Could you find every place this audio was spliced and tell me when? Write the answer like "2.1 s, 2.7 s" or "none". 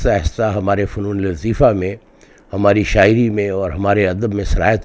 none